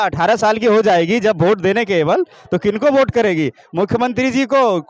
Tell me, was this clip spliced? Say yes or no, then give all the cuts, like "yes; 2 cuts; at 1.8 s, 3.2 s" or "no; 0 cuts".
no; 0 cuts